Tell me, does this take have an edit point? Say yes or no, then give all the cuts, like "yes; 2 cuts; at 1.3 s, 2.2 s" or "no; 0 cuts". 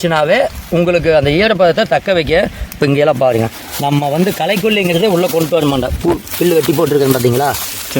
no; 0 cuts